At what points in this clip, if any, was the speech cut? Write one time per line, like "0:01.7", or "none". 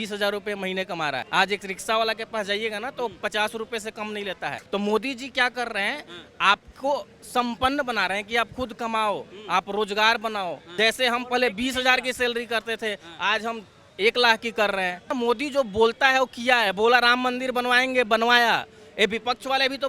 0:04.6
0:10.6
0:15.1